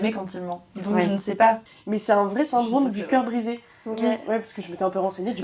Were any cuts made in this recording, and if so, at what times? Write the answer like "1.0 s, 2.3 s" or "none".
1.6 s